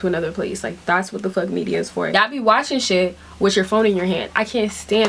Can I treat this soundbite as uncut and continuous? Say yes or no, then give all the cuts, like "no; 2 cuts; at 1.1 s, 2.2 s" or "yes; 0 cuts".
no; 1 cut; at 2.1 s